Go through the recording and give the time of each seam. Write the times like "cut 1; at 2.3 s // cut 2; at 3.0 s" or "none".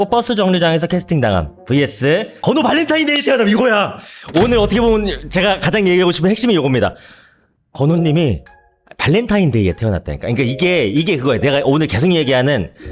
cut 1; at 2.3 s